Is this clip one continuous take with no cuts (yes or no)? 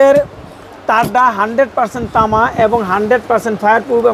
yes